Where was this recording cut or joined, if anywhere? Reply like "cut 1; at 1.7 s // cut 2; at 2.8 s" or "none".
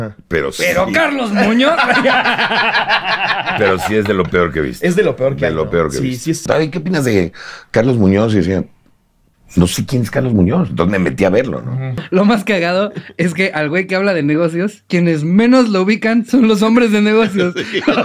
cut 1; at 6.4 s // cut 2; at 12.0 s